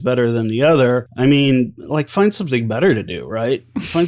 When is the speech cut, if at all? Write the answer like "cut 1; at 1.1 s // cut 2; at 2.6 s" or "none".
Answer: cut 1; at 1.1 s // cut 2; at 1.8 s

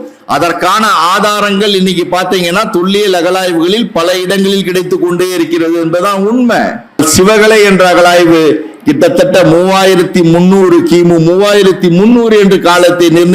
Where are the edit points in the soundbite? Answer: cut 1; at 7.0 s

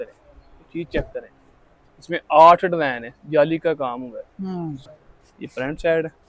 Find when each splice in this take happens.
cut 1; at 4.9 s

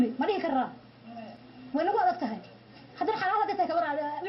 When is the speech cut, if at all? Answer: cut 1; at 2.3 s

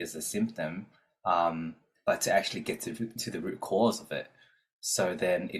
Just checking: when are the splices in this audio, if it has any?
none

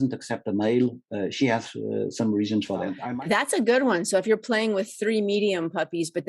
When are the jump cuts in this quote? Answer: cut 1; at 3.0 s

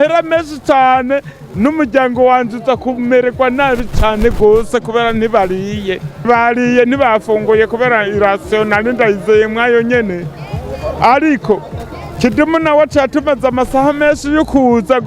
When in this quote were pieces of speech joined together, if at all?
cut 1; at 6.3 s

